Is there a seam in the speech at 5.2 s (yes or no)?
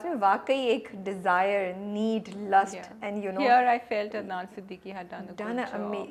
no